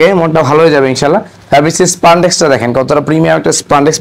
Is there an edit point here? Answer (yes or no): no